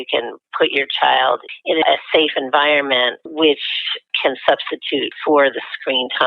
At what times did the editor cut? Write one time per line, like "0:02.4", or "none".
0:01.8
0:03.2
0:04.1
0:05.2